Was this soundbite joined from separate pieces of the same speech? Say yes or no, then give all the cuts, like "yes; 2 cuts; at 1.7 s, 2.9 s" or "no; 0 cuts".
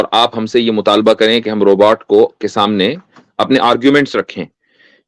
no; 0 cuts